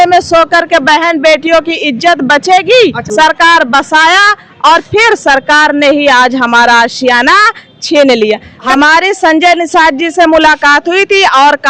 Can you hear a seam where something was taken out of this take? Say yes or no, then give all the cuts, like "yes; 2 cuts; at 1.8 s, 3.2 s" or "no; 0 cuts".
yes; 2 cuts; at 3.0 s, 8.6 s